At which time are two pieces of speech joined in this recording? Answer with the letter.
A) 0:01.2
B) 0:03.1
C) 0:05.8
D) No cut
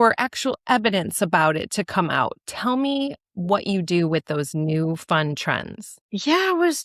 D